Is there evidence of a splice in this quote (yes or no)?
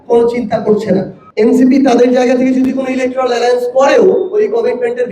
yes